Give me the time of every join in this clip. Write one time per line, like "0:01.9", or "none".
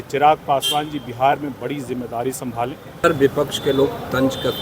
0:02.9